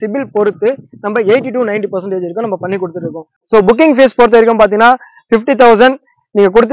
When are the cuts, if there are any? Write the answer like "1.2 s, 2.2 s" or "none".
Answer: 3.4 s